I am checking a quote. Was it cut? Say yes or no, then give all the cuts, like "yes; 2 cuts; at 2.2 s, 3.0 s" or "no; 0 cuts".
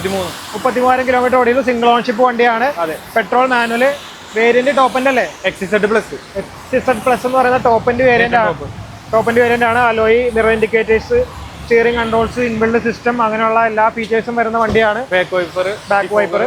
no; 0 cuts